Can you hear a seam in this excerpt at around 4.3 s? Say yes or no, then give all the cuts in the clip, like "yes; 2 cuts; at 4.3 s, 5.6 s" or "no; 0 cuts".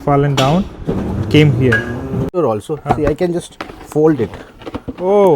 no; 1 cut; at 2.3 s